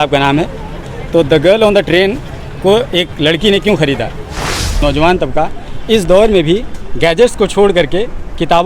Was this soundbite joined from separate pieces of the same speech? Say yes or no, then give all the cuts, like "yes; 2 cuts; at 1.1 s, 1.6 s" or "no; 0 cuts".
yes; 1 cut; at 4.8 s